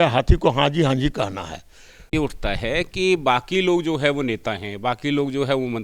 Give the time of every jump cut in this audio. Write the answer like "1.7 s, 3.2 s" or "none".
2.1 s